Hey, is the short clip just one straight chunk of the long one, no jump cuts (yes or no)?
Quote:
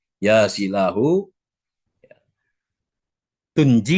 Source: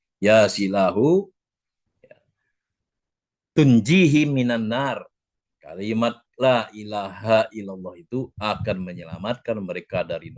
yes